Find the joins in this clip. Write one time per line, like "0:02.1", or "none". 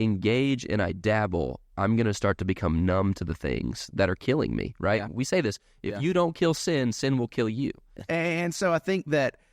0:07.9